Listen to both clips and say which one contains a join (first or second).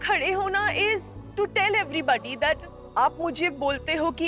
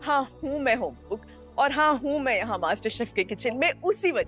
first